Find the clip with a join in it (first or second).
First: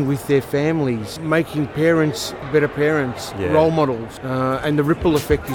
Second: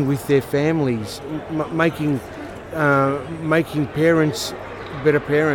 first